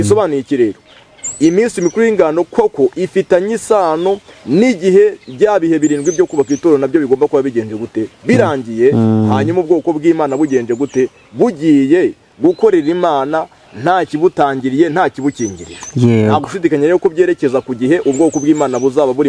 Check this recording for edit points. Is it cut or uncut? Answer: uncut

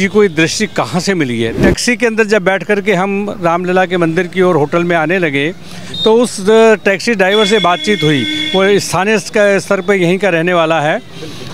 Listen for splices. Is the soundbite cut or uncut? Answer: cut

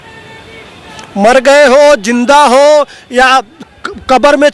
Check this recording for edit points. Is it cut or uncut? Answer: uncut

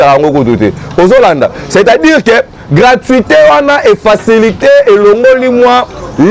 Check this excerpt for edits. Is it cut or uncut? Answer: uncut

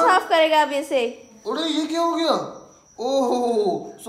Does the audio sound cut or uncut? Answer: cut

